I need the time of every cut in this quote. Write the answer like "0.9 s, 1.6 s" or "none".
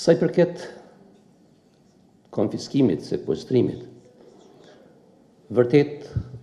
none